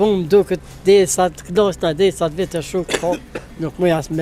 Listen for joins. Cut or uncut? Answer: uncut